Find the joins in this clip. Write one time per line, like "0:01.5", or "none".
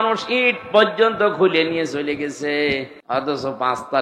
0:02.9